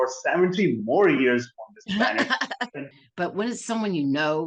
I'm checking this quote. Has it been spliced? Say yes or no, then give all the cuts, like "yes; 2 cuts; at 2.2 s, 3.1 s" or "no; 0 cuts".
yes; 1 cut; at 2.9 s